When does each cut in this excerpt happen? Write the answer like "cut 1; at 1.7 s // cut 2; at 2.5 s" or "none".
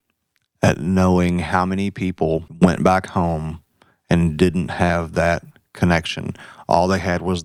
cut 1; at 2.5 s